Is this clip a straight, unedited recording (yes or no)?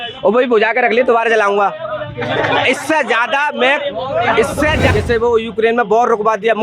no